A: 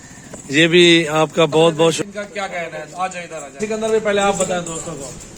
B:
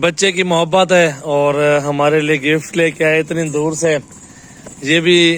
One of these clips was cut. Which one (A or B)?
A